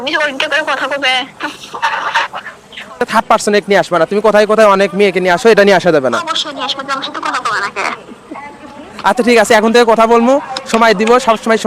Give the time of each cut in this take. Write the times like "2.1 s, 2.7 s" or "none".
3.0 s